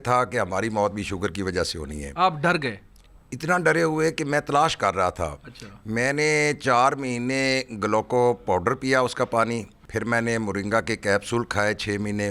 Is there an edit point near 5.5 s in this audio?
no; 1 cut; at 9.8 s

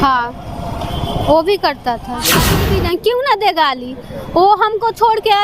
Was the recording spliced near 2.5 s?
yes; 1 cut; at 2.5 s

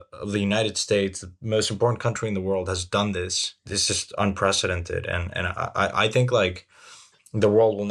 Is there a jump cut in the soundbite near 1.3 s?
no; 1 cut; at 3.7 s

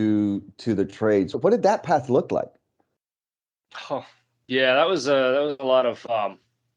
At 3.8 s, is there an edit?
no; 1 cut; at 1.4 s

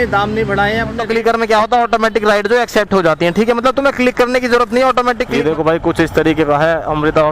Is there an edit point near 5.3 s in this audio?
yes; 2 cuts; at 1.0 s, 5.3 s

